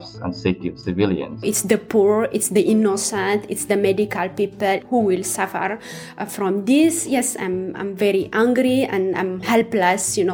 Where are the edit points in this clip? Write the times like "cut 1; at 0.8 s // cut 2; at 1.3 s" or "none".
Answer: cut 1; at 1.4 s // cut 2; at 4.8 s // cut 3; at 9.4 s

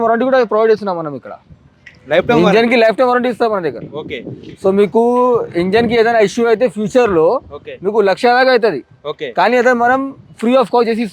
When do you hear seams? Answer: none

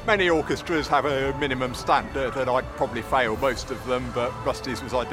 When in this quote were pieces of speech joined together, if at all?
none

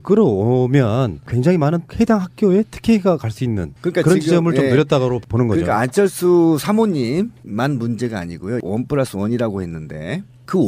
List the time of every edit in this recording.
cut 1; at 3.9 s

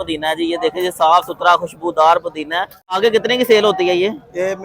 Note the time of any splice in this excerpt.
cut 1; at 3.0 s

